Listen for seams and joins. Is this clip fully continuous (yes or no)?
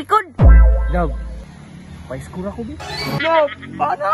no